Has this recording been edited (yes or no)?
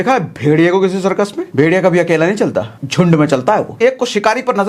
yes